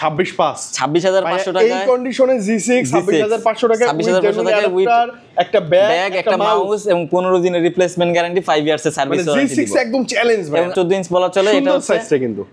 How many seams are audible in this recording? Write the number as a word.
one